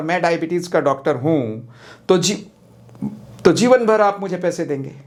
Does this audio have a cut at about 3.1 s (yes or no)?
no